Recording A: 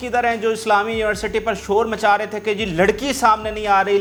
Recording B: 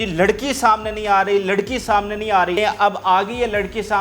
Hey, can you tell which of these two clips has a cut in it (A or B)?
B